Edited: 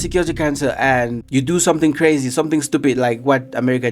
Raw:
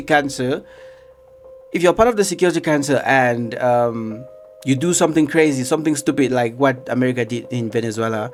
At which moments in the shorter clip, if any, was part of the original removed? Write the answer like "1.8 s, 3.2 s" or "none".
1.2 s